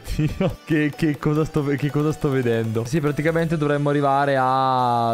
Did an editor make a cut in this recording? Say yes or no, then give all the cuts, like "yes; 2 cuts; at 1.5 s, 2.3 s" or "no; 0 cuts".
yes; 1 cut; at 2.9 s